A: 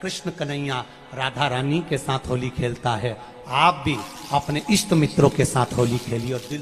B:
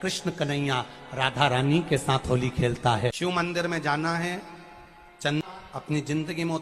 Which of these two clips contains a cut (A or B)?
B